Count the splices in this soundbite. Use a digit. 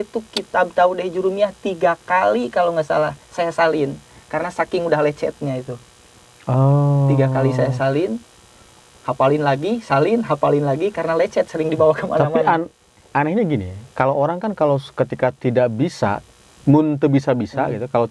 0